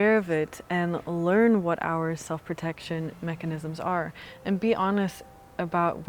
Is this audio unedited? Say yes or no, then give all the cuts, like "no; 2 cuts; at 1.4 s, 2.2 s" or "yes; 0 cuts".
yes; 0 cuts